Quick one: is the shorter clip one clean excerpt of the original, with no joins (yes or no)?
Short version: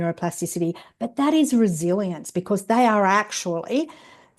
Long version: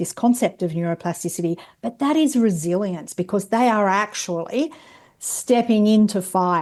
yes